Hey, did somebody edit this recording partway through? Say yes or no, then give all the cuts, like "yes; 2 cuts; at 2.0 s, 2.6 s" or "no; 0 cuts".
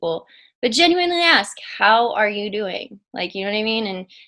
no; 0 cuts